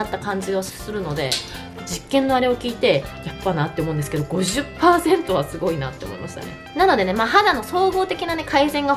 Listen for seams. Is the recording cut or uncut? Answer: uncut